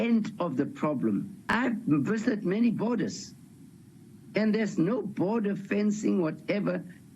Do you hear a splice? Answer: yes; 1 cut; at 1.5 s

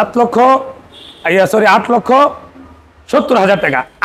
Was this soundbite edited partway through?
no; 0 cuts

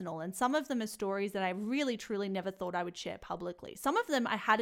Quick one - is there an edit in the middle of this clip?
no; 0 cuts

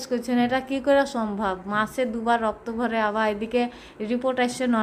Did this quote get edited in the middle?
no; 0 cuts

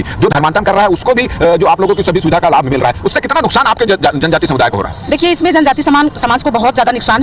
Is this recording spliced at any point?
no; 0 cuts

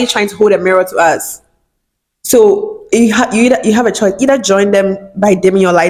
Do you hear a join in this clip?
no; 0 cuts

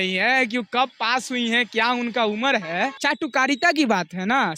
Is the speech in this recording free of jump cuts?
no; 1 cut; at 3.0 s

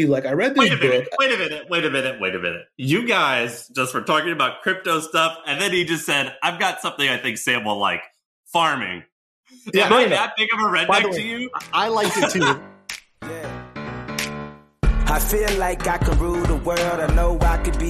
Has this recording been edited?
yes; 1 cut; at 12.6 s

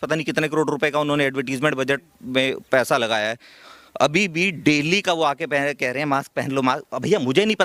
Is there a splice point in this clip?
no; 0 cuts

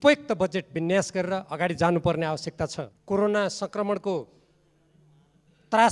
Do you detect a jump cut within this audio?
yes; 1 cut; at 2.9 s

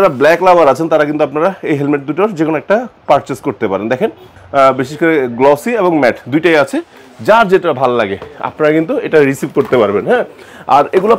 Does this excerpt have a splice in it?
no; 0 cuts

